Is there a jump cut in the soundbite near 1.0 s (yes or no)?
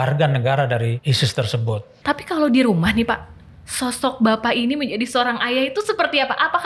yes